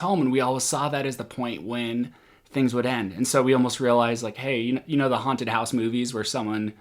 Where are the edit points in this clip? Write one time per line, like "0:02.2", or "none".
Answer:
none